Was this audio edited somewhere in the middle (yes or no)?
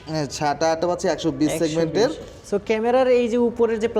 yes